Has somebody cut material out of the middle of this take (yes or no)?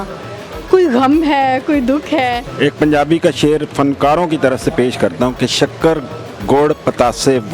yes